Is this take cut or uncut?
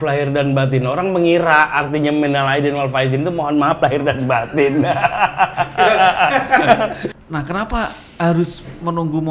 cut